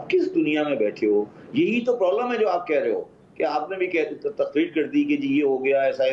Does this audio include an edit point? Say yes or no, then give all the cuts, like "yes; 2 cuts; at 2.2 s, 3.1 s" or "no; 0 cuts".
no; 0 cuts